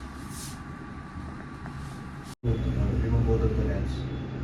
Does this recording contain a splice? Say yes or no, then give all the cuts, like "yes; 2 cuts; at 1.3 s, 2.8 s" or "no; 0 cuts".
yes; 1 cut; at 2.5 s